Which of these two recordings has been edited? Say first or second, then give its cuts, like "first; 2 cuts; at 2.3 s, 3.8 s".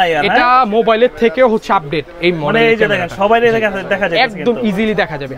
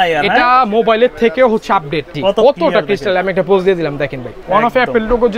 second; 2 cuts; at 2.0 s, 4.4 s